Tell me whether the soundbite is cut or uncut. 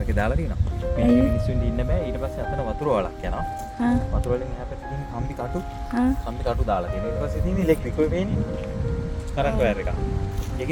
uncut